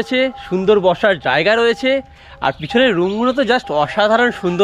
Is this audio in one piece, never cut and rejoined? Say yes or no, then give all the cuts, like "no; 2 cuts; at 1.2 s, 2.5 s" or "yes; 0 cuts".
yes; 0 cuts